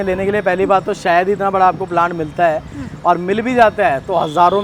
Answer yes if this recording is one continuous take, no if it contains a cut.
yes